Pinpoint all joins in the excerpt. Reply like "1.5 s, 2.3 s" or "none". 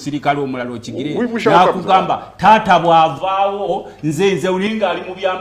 none